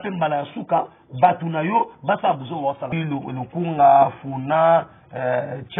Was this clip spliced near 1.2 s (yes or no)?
no